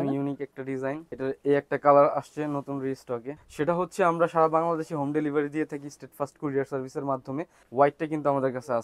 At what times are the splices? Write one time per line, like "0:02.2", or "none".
0:01.1
0:03.4
0:07.6